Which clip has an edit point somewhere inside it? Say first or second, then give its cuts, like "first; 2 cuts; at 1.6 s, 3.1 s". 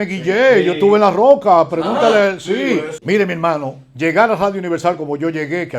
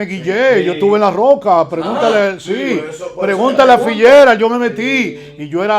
first; 1 cut; at 2.9 s